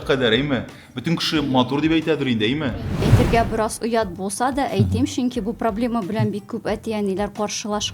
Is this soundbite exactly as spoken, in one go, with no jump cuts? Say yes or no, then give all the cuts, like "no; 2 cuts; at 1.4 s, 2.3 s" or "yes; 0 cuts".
no; 1 cut; at 3.1 s